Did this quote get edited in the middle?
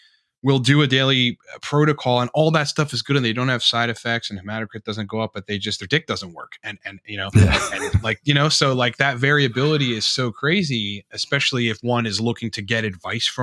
no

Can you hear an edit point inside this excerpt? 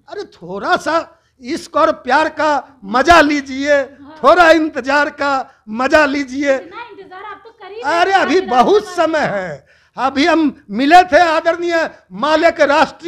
no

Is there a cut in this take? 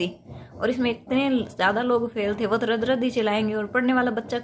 no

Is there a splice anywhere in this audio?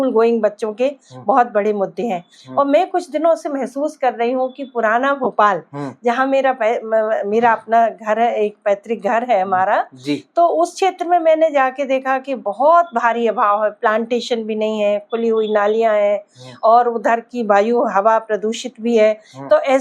no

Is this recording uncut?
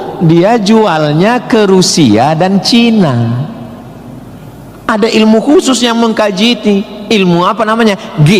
no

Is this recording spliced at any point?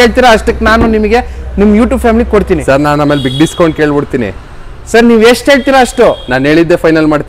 no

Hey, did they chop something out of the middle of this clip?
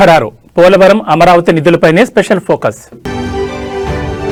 no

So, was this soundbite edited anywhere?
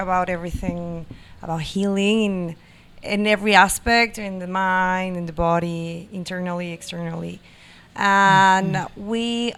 no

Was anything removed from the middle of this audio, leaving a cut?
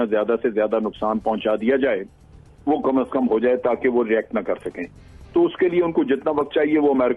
no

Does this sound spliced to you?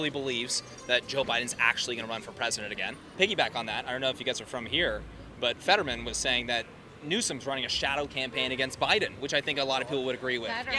no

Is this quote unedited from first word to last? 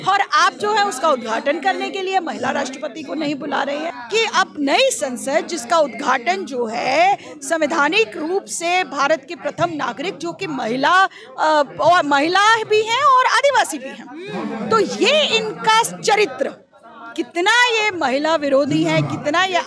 no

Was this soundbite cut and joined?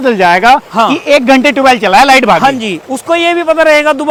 no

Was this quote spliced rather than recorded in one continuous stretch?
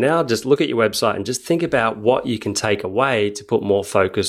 no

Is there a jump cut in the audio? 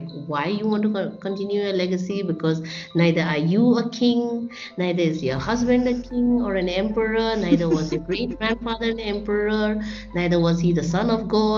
no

